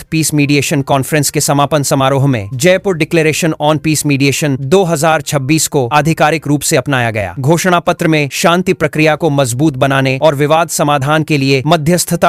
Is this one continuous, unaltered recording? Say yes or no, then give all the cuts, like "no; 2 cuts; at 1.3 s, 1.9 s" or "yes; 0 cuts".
yes; 0 cuts